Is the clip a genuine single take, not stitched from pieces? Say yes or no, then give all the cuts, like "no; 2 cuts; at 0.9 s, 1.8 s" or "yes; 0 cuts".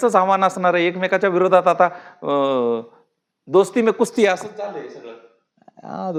yes; 0 cuts